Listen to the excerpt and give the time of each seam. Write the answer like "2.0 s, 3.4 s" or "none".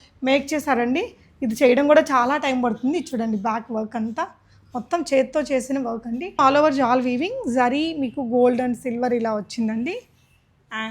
6.4 s